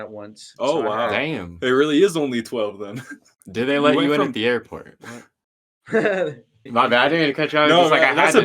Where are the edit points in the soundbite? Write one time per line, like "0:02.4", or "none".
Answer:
0:03.4
0:06.6

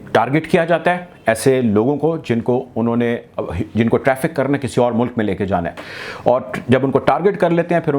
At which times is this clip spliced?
none

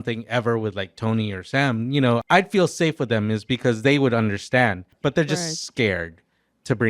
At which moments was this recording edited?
0:02.2
0:04.9

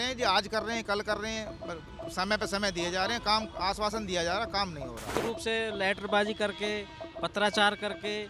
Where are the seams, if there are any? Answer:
0:05.2

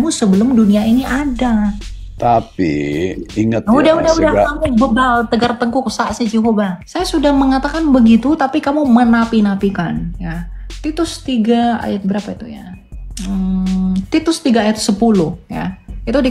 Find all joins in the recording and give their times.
none

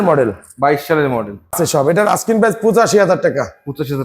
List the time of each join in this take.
0:01.5

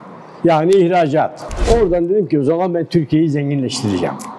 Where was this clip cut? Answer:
0:01.5

